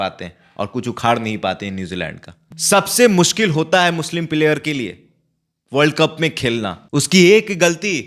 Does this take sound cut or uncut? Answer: cut